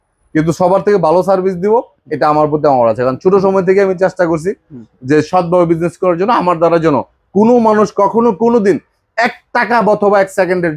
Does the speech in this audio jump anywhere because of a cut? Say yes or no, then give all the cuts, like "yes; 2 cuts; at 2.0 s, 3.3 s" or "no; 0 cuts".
no; 0 cuts